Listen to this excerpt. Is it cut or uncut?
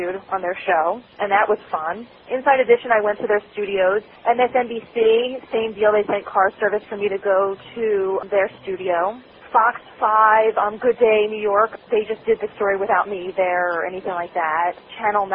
uncut